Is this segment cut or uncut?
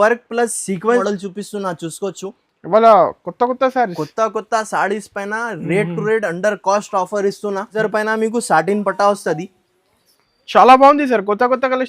cut